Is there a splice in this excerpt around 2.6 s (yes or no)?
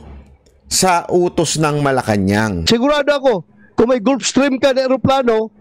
yes